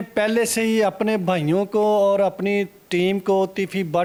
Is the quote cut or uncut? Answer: uncut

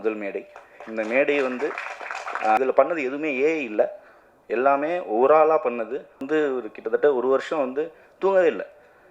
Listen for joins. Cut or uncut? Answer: cut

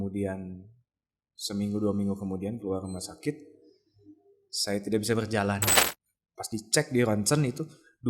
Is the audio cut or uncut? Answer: cut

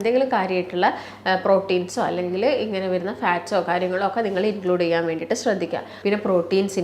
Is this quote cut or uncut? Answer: cut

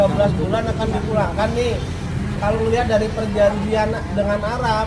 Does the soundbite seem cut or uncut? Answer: uncut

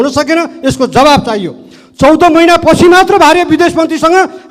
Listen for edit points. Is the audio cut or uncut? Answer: uncut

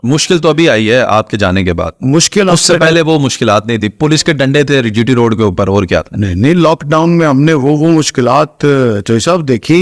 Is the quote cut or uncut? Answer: uncut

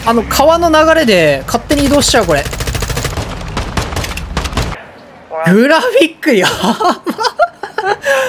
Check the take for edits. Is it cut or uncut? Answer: cut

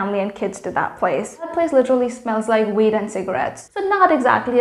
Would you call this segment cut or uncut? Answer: uncut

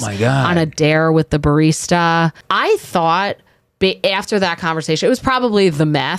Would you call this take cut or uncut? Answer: cut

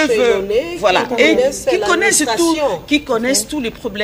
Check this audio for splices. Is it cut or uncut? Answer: uncut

